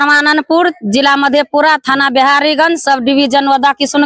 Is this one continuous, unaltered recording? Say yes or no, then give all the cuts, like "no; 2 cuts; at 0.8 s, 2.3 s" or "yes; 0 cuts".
yes; 0 cuts